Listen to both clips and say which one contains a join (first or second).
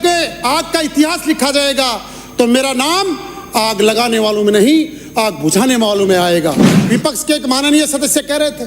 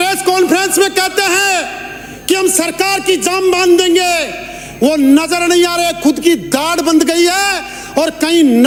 first